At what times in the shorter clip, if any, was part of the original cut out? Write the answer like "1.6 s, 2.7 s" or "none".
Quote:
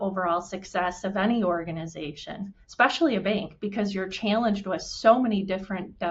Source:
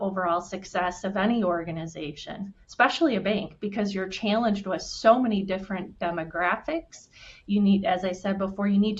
none